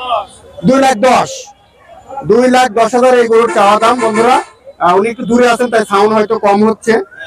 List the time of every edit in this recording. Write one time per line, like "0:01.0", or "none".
none